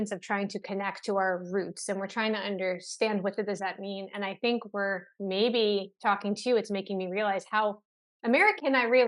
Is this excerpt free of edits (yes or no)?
yes